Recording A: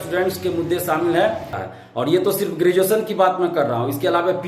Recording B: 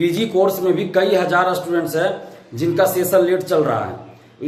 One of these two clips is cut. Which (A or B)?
A